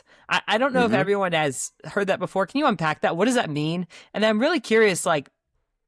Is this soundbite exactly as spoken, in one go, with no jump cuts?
yes; 0 cuts

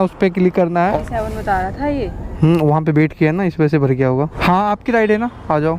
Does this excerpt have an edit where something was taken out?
yes; 2 cuts; at 1.0 s, 4.4 s

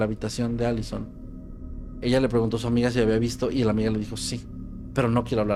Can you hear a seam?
no; 0 cuts

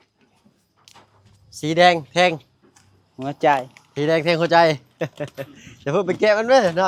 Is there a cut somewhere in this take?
no; 0 cuts

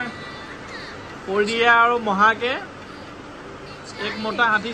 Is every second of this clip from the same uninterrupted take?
yes; 0 cuts

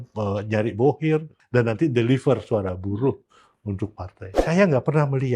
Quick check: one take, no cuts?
no; 2 cuts; at 1.4 s, 4.4 s

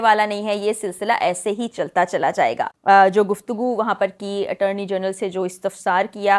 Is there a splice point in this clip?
yes; 1 cut; at 2.7 s

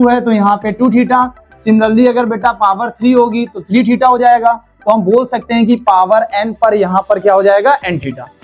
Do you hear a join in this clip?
no; 0 cuts

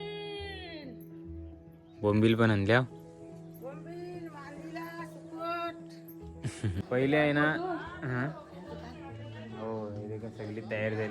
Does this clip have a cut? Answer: yes; 1 cut; at 6.8 s

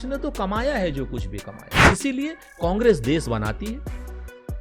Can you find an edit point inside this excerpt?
yes; 1 cut; at 1.7 s

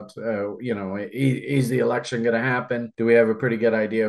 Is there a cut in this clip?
yes; 1 cut; at 2.9 s

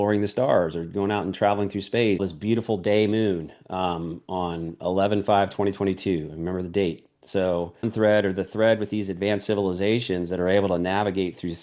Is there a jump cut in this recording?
yes; 2 cuts; at 2.2 s, 7.9 s

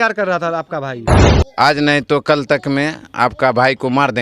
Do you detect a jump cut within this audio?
yes; 1 cut; at 1.3 s

